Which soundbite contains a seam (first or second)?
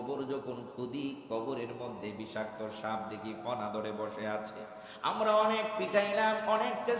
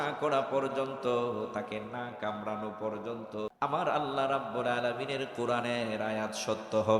second